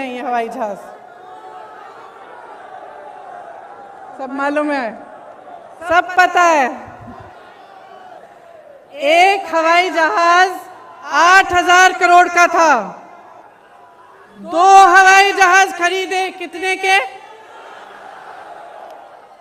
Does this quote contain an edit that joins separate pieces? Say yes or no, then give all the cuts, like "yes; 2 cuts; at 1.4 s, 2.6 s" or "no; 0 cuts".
no; 0 cuts